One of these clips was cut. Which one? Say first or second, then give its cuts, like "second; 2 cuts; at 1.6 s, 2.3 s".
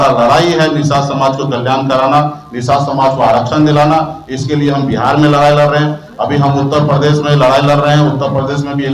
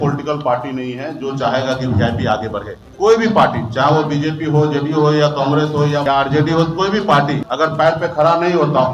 second; 3 cuts; at 2.8 s, 6.0 s, 7.5 s